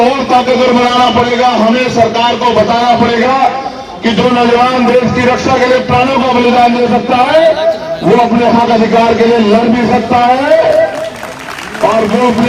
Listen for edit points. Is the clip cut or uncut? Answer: uncut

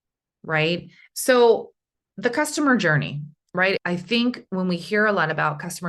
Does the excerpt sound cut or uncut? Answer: cut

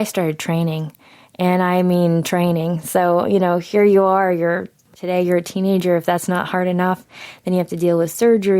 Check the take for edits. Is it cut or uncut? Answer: cut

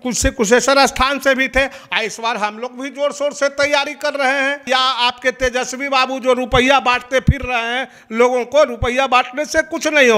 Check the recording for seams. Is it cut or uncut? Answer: cut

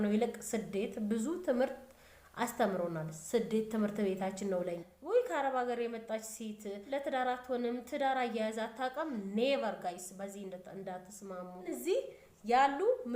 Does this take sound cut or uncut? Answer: cut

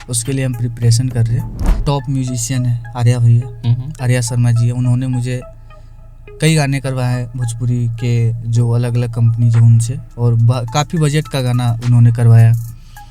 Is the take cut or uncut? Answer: cut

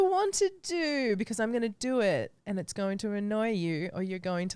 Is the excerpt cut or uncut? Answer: uncut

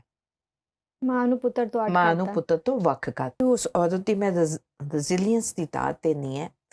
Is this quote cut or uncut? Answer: cut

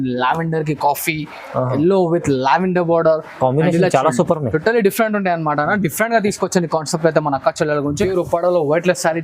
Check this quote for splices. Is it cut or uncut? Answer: cut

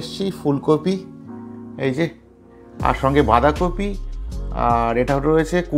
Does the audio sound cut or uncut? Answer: uncut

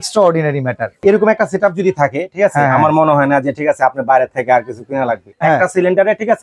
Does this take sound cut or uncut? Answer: cut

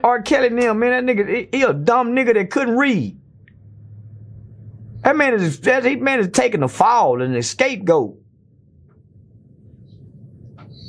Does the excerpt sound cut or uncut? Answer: uncut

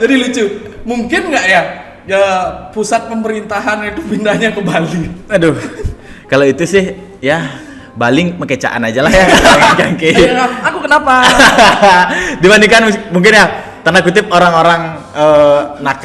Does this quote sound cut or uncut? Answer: cut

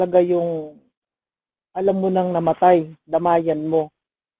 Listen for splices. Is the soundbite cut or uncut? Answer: uncut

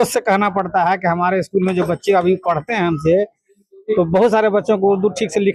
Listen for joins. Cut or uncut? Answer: uncut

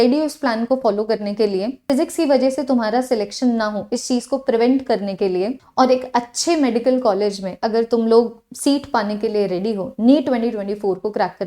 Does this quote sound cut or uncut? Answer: uncut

